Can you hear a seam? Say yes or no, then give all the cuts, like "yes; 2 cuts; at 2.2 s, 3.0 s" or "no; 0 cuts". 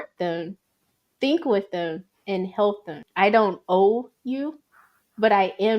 yes; 1 cut; at 3.0 s